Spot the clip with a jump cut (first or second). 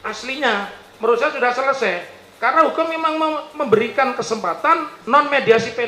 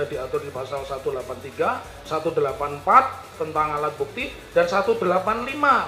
first